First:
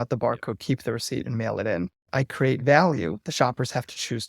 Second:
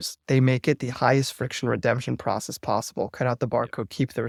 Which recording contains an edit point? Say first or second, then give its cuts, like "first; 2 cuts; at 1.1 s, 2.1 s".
first; 1 cut; at 2.2 s